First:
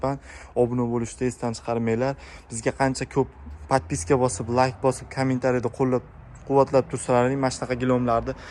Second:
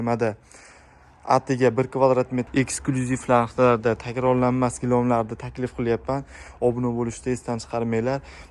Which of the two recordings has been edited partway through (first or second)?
second